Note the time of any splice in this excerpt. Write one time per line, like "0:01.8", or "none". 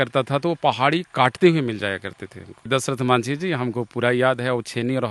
none